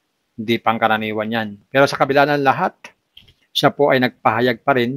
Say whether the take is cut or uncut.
uncut